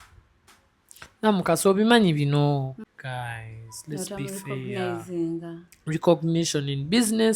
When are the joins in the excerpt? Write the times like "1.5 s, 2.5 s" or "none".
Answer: 2.7 s

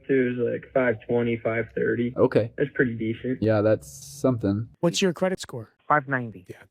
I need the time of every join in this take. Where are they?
4.7 s

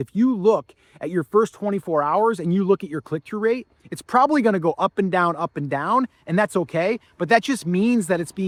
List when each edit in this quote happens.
none

